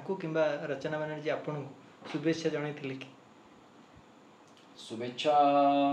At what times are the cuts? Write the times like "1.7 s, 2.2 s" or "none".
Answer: none